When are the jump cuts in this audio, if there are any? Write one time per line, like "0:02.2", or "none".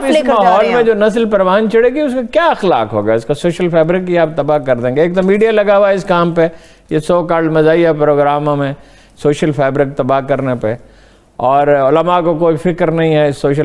none